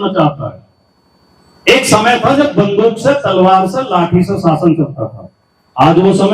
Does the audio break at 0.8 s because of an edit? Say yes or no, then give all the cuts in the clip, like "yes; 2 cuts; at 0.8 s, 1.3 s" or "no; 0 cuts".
no; 0 cuts